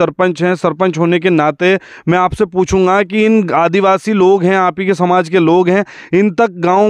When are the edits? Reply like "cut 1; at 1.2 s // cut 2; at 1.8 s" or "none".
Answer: none